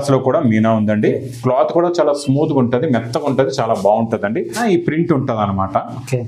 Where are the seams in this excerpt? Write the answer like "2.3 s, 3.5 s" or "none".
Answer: 4.6 s